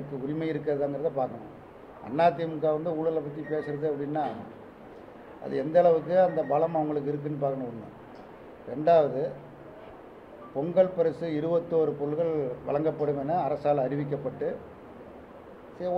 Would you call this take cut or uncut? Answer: uncut